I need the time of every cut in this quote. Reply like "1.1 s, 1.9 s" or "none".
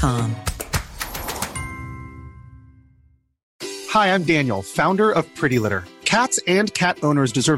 3.4 s